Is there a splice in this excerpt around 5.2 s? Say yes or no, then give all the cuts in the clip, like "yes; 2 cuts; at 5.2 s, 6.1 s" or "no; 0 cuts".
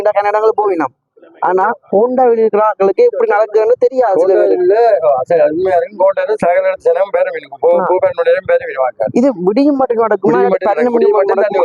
no; 0 cuts